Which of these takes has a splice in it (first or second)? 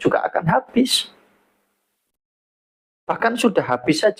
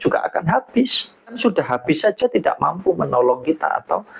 second